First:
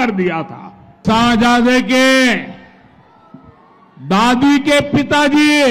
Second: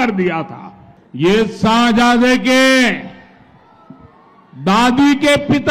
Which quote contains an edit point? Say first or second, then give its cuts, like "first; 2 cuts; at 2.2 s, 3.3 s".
first; 1 cut; at 1.0 s